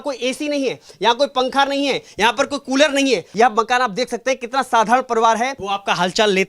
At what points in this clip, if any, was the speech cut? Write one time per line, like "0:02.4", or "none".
0:03.3
0:05.6